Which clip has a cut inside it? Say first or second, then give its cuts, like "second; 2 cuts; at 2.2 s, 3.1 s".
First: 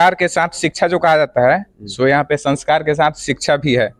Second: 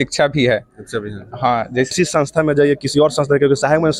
second; 1 cut; at 1.9 s